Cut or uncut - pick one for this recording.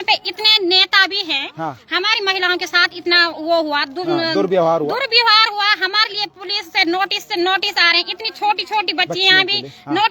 uncut